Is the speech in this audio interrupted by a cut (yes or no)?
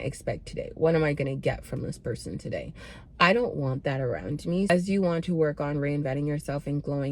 yes